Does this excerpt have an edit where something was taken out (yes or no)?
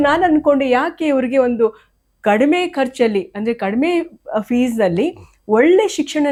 no